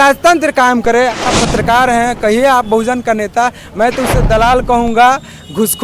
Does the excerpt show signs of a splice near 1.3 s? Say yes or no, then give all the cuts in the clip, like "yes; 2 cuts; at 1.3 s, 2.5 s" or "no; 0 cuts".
yes; 1 cut; at 1.3 s